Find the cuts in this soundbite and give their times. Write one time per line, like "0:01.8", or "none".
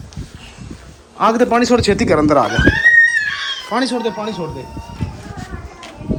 none